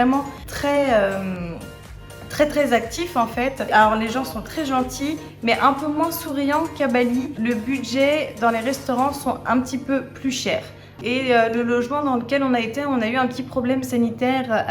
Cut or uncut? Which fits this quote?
cut